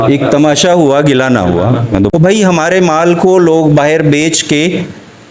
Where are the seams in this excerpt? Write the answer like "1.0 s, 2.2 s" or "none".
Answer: 2.1 s